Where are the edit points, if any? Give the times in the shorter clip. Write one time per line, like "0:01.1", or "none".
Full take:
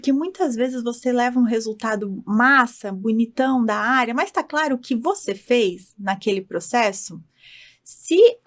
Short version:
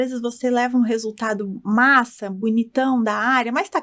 none